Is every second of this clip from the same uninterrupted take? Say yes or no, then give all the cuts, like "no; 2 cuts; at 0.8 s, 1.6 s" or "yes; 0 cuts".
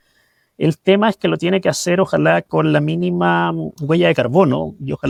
yes; 0 cuts